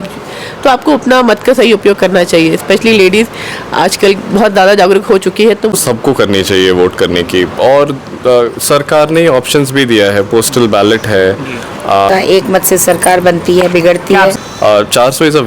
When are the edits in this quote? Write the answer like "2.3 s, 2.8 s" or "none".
5.8 s, 12.1 s, 14.4 s